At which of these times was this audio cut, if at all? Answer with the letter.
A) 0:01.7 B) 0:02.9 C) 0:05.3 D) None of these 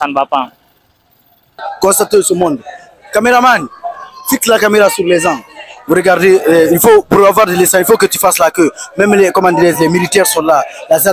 A